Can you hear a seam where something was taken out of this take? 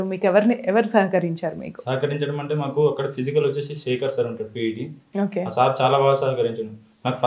no; 0 cuts

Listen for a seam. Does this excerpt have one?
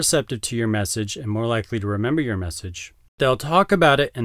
yes; 1 cut; at 3.2 s

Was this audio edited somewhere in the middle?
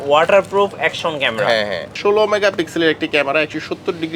yes; 1 cut; at 1.9 s

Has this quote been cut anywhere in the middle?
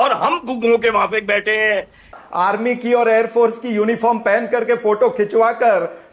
yes; 1 cut; at 2.1 s

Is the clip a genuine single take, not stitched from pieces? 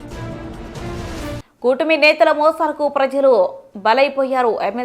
yes; 0 cuts

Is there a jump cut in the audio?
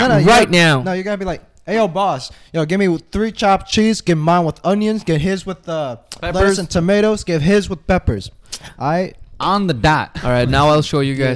no; 0 cuts

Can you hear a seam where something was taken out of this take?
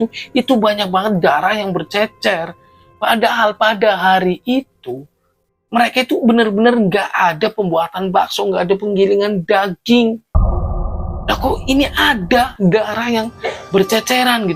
no; 0 cuts

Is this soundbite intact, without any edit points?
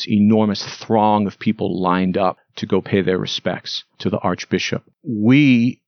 no; 2 cuts; at 2.5 s, 4.9 s

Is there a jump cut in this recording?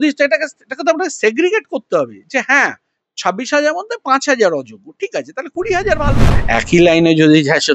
yes; 1 cut; at 6.3 s

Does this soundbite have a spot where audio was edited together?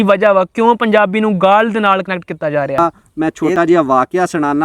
yes; 1 cut; at 3.0 s

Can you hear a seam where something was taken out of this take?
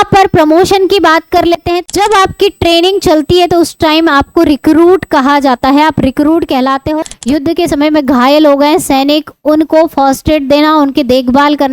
yes; 1 cut; at 7.0 s

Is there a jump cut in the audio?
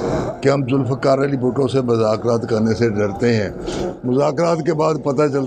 no; 0 cuts

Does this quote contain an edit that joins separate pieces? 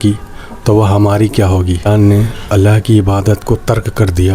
yes; 1 cut; at 1.9 s

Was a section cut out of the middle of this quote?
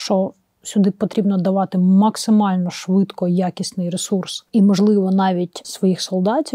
yes; 2 cuts; at 4.4 s, 5.6 s

